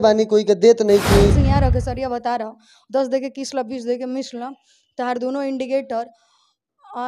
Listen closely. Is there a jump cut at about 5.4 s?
no; 1 cut; at 1.4 s

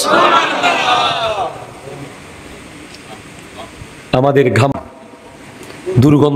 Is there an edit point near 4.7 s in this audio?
yes; 1 cut; at 4.7 s

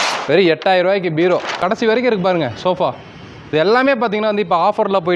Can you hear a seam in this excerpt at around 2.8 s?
no; 1 cut; at 1.6 s

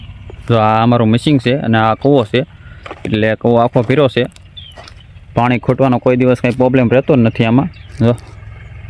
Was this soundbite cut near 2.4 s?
no; 0 cuts

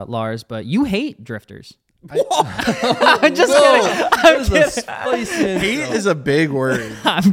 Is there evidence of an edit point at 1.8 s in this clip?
no; 0 cuts

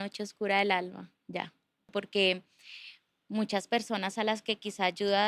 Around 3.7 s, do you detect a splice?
no; 1 cut; at 1.8 s

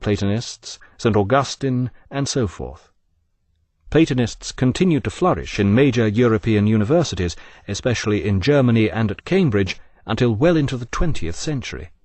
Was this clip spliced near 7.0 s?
no; 1 cut; at 2.6 s

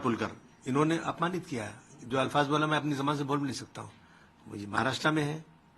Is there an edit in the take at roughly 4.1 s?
no; 0 cuts

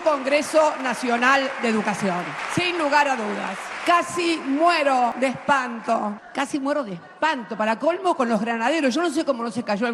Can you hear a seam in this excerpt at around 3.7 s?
no; 0 cuts

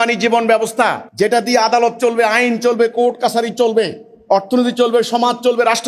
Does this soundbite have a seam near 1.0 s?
yes; 1 cut; at 1.0 s

